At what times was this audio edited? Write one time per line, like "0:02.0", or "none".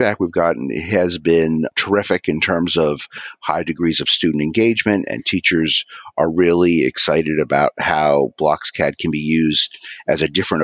0:01.7